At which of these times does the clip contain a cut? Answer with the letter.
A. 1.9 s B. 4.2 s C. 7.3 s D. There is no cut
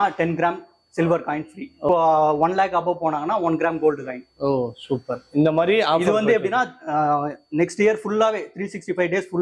A